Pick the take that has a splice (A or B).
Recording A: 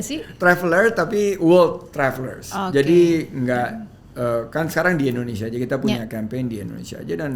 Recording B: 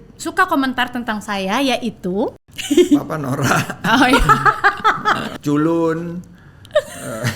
B